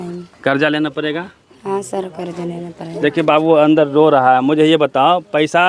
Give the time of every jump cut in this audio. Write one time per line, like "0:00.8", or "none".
none

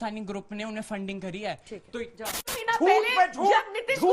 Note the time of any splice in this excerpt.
0:02.5

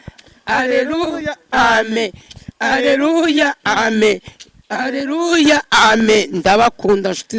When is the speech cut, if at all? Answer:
none

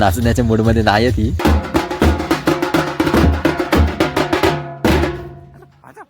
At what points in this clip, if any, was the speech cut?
0:01.4

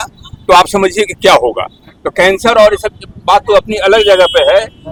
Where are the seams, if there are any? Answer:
none

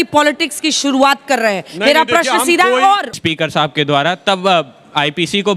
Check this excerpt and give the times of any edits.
0:03.1

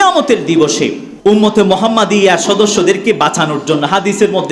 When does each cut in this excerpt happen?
0:01.1

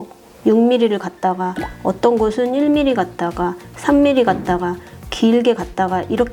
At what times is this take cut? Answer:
none

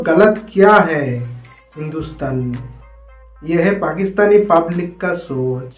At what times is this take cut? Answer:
0:01.2

